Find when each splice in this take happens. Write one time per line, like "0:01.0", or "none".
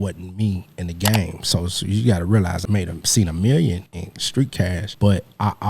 0:02.6
0:04.4